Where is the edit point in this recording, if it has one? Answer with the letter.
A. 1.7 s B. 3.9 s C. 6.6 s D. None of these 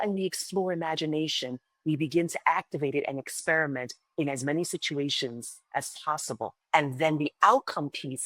C